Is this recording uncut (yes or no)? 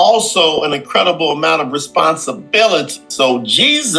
no